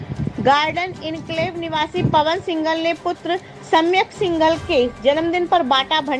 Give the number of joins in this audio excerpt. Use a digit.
0